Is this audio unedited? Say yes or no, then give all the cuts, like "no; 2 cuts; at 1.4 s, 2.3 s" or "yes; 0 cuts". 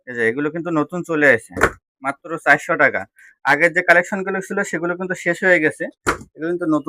yes; 0 cuts